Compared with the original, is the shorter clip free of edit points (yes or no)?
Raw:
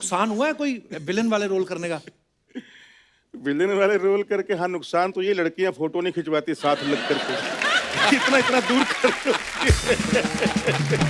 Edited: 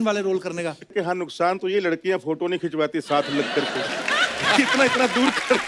no